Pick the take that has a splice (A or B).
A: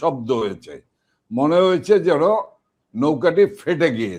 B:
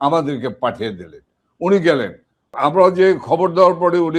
B